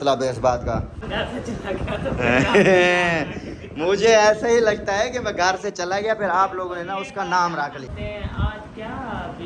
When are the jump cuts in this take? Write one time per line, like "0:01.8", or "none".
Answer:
0:01.0
0:07.9